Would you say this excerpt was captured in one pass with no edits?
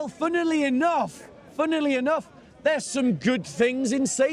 yes; 0 cuts

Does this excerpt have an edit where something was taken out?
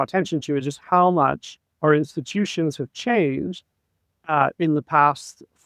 no; 0 cuts

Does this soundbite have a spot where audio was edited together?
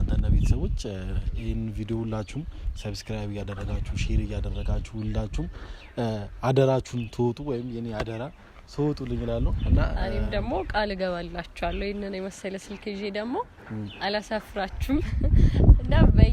no; 0 cuts

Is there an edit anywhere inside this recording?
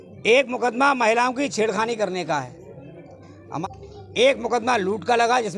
yes; 1 cut; at 3.6 s

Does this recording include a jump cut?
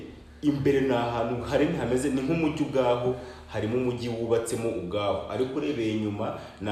no; 0 cuts

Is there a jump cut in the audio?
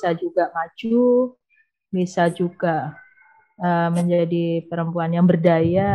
no; 0 cuts

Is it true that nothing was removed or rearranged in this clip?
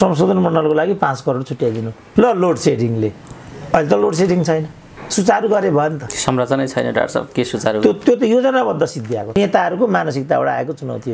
no; 2 cuts; at 1.9 s, 9.3 s

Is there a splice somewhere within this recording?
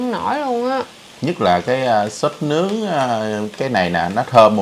no; 0 cuts

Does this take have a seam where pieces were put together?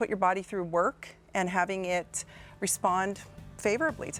no; 0 cuts

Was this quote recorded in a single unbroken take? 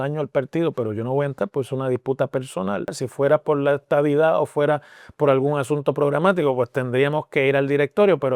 no; 1 cut; at 3.0 s

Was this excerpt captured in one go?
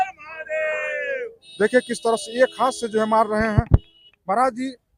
yes; 0 cuts

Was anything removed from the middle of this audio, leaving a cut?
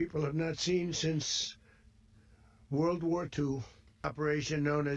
yes; 1 cut; at 4.0 s

